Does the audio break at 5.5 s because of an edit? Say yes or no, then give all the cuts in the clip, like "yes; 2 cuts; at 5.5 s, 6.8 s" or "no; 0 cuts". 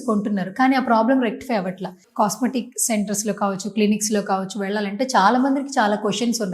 no; 1 cut; at 2.0 s